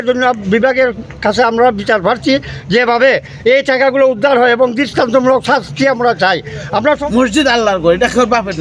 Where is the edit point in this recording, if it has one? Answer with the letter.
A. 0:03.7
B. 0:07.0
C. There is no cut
B